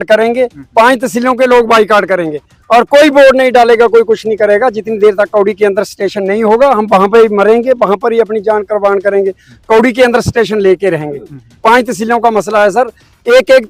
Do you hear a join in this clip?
no; 0 cuts

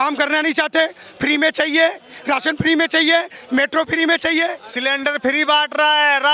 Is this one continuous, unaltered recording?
no; 1 cut; at 4.7 s

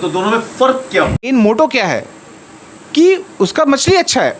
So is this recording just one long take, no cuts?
no; 1 cut; at 1.3 s

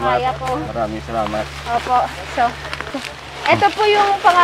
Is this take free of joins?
no; 1 cut; at 2.9 s

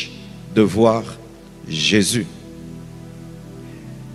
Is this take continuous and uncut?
yes; 0 cuts

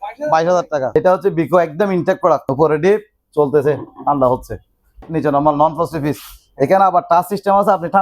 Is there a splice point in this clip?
yes; 3 cuts; at 1.0 s, 2.5 s, 5.1 s

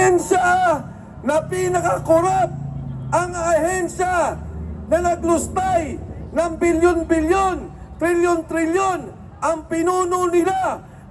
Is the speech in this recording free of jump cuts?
yes; 0 cuts

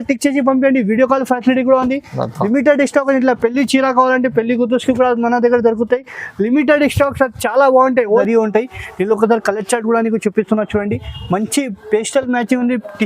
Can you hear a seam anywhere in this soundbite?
yes; 1 cut; at 8.2 s

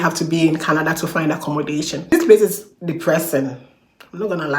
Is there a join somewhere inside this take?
yes; 1 cut; at 2.1 s

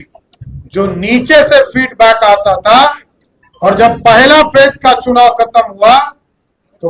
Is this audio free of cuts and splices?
yes; 0 cuts

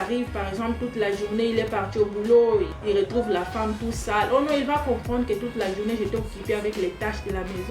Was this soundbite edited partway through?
yes; 1 cut; at 2.8 s

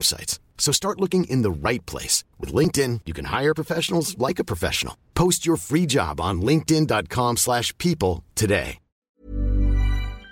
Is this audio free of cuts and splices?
no; 1 cut; at 9.2 s

